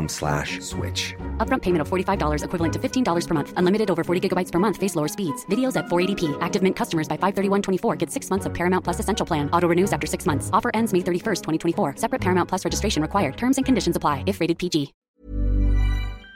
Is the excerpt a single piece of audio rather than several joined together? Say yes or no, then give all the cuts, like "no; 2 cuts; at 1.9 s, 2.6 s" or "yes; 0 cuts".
no; 1 cut; at 15.2 s